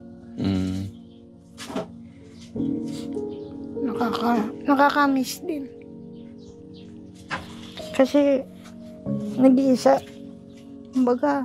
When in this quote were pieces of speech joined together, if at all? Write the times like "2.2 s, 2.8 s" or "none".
2.4 s, 3.6 s